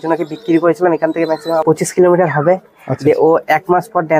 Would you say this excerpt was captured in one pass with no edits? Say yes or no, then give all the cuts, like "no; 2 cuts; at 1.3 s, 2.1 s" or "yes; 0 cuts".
no; 1 cut; at 1.6 s